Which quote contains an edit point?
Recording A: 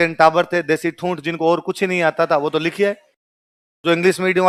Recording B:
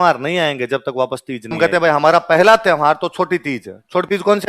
B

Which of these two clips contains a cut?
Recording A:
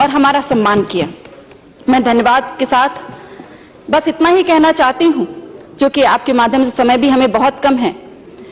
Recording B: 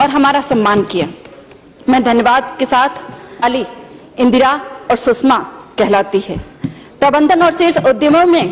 A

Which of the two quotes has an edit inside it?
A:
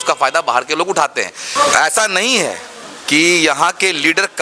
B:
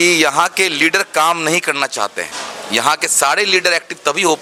A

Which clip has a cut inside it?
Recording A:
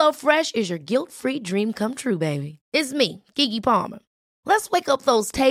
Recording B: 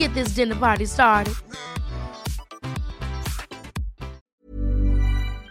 B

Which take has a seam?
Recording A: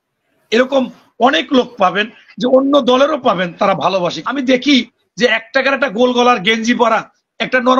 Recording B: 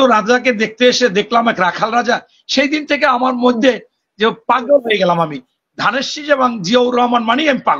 A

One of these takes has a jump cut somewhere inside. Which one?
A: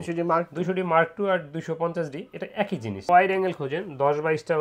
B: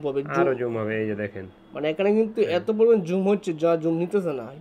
A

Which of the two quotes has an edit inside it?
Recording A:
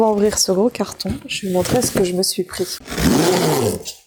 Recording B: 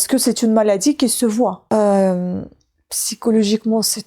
B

